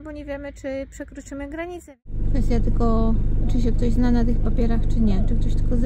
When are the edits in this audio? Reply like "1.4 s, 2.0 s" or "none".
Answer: 1.9 s